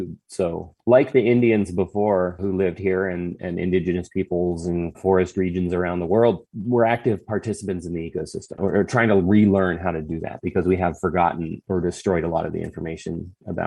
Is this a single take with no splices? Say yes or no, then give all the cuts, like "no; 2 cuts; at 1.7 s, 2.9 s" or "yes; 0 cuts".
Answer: no; 1 cut; at 8.5 s